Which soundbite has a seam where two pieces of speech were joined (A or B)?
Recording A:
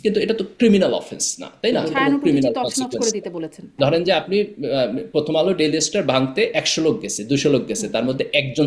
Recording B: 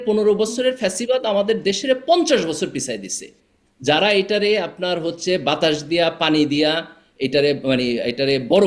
A